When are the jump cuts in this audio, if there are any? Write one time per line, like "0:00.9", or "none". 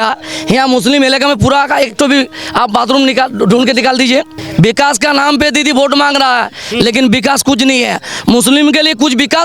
0:04.4

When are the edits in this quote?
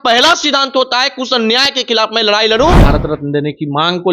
0:02.8

